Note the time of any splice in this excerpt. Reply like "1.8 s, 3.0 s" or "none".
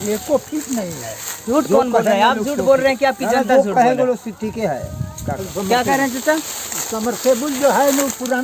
1.4 s, 5.5 s